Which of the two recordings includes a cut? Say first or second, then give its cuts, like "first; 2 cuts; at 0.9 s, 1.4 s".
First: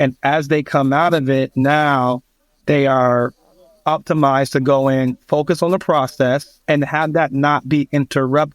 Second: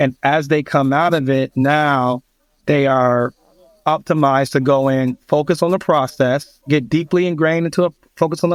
first; 1 cut; at 6.5 s